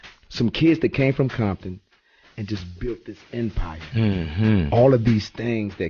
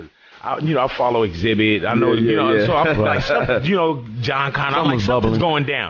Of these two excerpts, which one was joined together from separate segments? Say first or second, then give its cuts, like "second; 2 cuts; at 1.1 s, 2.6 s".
second; 1 cut; at 2.4 s